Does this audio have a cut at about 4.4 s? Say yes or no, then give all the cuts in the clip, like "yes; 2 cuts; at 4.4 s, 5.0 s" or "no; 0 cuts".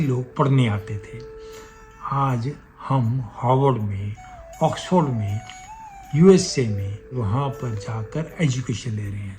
no; 1 cut; at 7.1 s